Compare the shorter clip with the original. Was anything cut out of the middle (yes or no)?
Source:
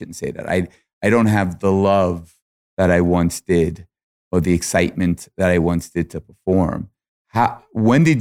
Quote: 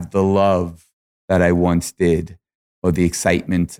no